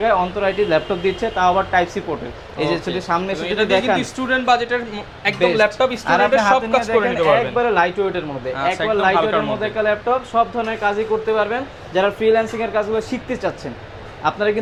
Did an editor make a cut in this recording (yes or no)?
no